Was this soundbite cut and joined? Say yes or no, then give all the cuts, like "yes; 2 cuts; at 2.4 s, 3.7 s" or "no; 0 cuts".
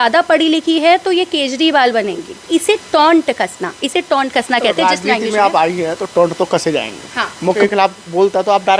yes; 2 cuts; at 2.5 s, 7.6 s